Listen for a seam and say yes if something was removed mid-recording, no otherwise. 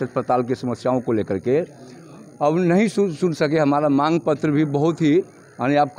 no